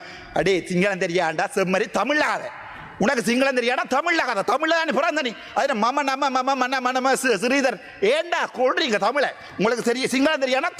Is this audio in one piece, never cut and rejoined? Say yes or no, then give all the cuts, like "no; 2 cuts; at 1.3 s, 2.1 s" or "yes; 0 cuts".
yes; 0 cuts